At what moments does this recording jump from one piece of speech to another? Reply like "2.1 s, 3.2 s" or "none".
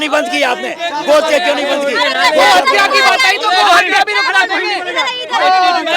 none